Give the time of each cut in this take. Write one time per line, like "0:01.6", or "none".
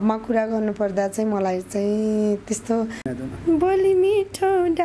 0:03.1